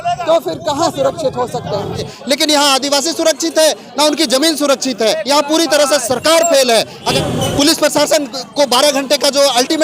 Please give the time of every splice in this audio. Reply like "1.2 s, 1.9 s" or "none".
2.1 s, 5.2 s, 7.1 s